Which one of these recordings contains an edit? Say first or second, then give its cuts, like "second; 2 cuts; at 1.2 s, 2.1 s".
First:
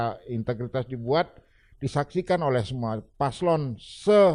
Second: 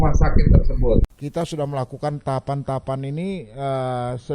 second; 1 cut; at 1.0 s